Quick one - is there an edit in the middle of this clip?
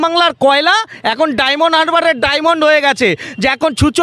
no; 0 cuts

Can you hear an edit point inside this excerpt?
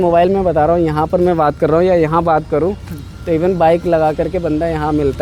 no; 0 cuts

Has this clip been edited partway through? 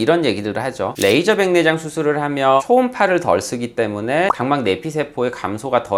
no; 0 cuts

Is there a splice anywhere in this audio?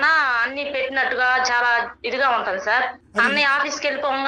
yes; 1 cut; at 3.3 s

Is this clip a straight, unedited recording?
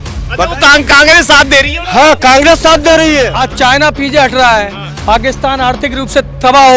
no; 1 cut; at 3.4 s

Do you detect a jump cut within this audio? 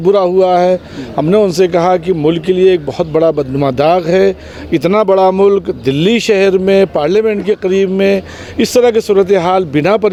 no; 0 cuts

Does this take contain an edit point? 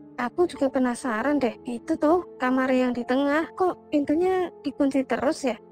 no; 0 cuts

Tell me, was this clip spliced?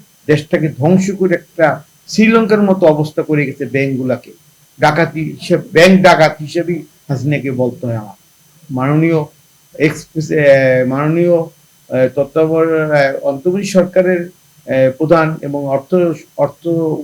no; 0 cuts

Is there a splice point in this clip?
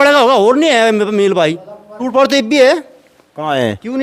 yes; 1 cut; at 2.0 s

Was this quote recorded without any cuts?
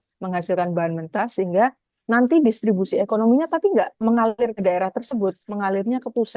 no; 2 cuts; at 4.2 s, 5.5 s

